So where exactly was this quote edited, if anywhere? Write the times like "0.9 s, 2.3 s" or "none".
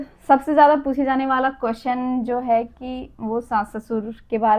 none